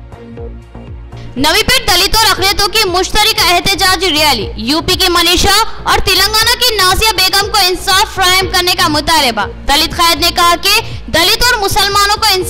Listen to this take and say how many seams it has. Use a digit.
1